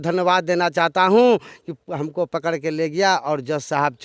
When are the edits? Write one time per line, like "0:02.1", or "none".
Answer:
none